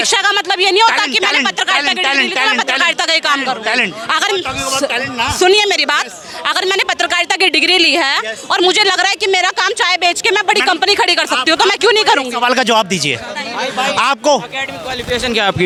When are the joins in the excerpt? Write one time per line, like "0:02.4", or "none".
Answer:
none